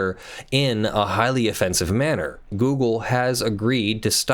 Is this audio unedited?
no; 1 cut; at 2.5 s

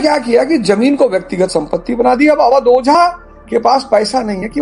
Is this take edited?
no; 0 cuts

